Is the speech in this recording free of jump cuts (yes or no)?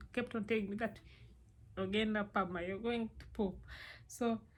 yes